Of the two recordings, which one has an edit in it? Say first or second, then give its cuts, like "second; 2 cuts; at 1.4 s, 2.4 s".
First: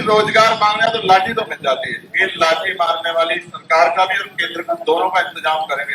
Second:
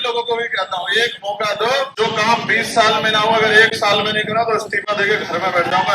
second; 1 cut; at 1.9 s